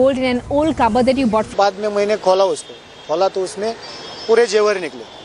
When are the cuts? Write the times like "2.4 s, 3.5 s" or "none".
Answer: none